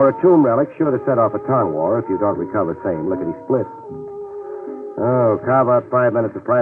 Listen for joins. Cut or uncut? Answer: cut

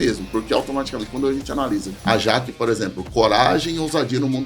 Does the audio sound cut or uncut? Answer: cut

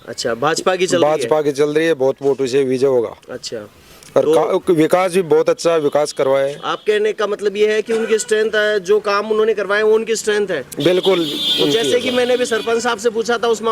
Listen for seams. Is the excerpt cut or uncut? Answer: uncut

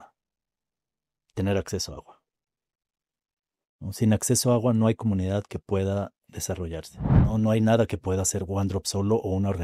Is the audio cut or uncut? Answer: cut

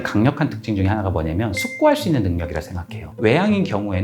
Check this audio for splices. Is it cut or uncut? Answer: cut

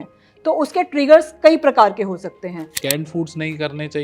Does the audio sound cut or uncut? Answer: cut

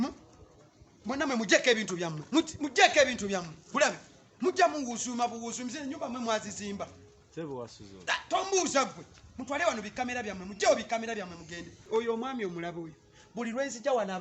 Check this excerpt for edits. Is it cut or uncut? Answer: cut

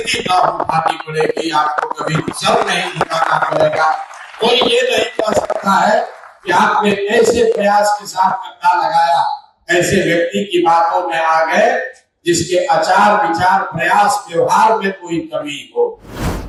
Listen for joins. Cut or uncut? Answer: uncut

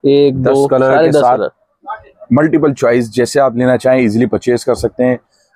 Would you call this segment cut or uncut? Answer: uncut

